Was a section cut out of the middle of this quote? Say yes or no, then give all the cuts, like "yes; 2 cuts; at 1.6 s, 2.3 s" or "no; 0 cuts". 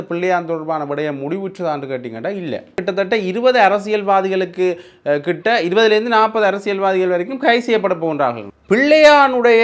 yes; 2 cuts; at 2.8 s, 8.5 s